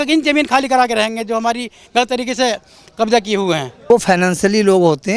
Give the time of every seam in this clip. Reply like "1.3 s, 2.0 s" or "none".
3.7 s